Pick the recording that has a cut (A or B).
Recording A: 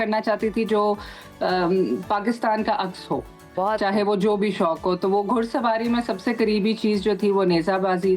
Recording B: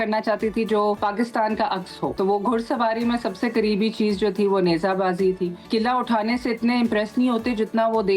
B